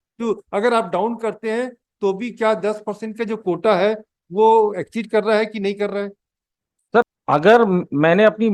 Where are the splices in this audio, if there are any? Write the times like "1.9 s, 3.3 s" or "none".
7.2 s